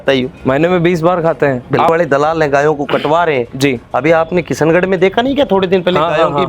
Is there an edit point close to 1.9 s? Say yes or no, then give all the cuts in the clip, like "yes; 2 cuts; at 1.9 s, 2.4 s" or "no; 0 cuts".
yes; 1 cut; at 1.9 s